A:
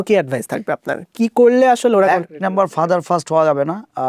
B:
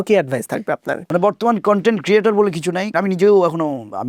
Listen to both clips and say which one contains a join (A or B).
B